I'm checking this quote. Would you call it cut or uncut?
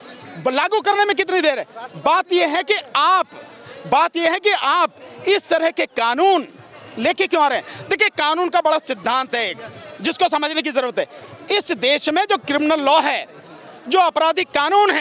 uncut